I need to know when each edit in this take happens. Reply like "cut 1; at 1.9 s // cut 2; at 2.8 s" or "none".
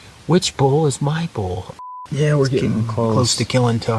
cut 1; at 1.8 s